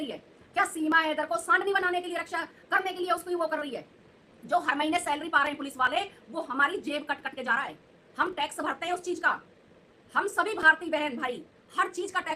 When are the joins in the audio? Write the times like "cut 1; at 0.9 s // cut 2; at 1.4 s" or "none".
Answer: none